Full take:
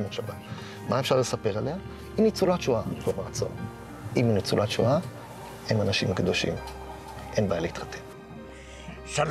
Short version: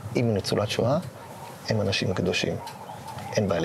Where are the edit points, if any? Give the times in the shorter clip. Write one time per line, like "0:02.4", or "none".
none

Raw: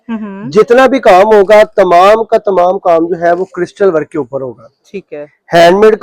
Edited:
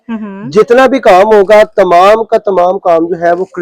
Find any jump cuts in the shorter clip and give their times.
none

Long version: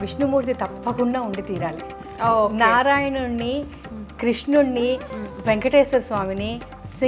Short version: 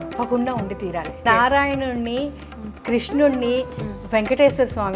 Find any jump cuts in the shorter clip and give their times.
0:01.2

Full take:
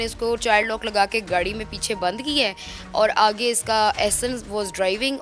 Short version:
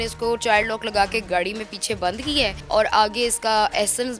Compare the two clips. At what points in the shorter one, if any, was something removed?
0:02.6

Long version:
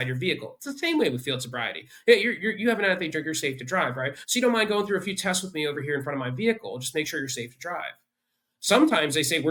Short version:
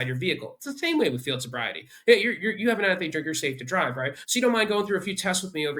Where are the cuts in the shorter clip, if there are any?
none

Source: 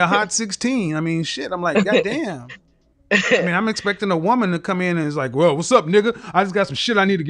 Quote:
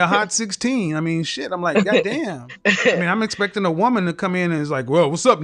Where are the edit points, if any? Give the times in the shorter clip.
0:02.4

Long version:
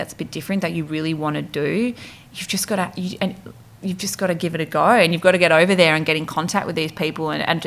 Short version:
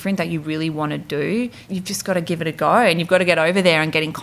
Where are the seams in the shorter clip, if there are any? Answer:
0:01.6

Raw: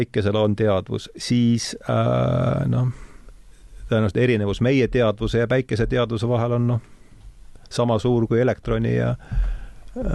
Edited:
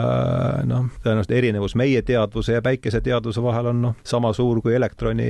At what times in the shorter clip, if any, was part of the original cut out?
0:00.9
0:04.0

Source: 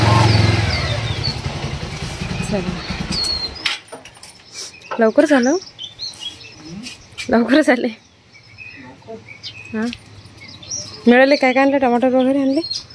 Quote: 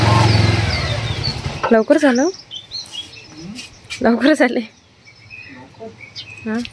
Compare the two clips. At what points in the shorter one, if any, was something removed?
0:01.4

